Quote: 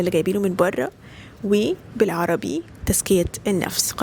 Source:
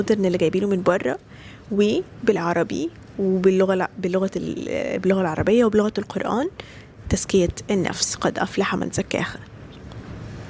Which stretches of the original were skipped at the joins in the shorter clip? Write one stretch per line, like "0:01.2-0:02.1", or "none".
0:03.0-0:06.9